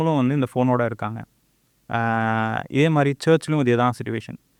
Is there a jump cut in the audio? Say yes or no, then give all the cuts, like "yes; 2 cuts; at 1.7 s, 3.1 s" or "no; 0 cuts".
no; 0 cuts